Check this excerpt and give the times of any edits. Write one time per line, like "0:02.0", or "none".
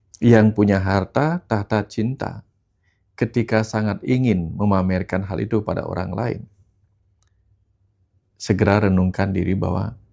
none